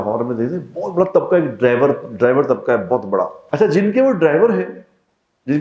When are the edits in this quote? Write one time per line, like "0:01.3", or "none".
0:03.4